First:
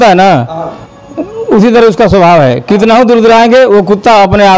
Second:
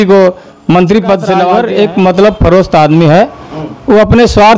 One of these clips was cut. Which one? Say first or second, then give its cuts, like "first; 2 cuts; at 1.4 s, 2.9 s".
second; 1 cut; at 1.6 s